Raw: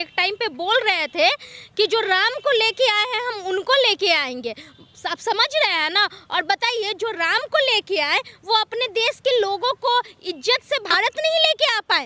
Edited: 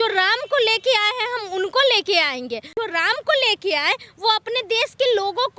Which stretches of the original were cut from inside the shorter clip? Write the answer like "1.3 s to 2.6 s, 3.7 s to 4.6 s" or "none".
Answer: 4.6 s to 6.9 s